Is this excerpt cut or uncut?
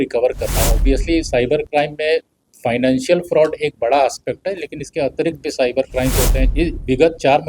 cut